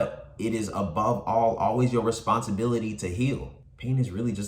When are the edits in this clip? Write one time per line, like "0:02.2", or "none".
0:03.5